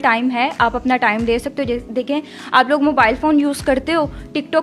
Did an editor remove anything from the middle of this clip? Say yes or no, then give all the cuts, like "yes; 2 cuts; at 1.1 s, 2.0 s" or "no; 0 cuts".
no; 0 cuts